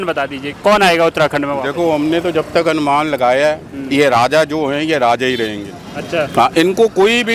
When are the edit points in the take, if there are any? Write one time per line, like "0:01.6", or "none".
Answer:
none